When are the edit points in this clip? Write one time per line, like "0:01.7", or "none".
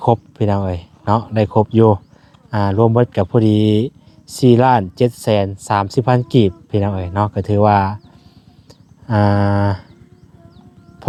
none